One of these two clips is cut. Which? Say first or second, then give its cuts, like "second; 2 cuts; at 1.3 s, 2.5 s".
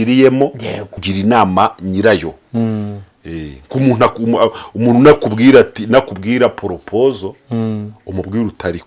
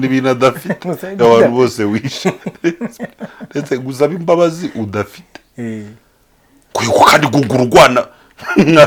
first; 1 cut; at 1.1 s